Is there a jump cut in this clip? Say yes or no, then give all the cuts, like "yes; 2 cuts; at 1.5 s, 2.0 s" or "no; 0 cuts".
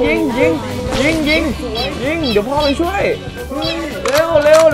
no; 0 cuts